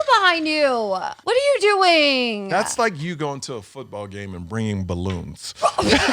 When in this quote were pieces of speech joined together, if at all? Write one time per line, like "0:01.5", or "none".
0:01.1